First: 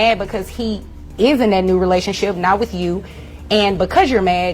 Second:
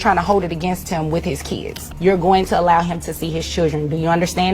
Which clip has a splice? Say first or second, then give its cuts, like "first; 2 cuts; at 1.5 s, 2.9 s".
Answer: second; 1 cut; at 1.8 s